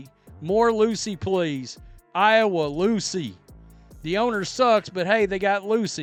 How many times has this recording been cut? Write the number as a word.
zero